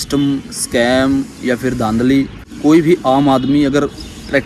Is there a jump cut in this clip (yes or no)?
yes